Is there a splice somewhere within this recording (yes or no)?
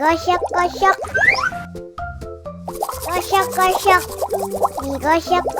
yes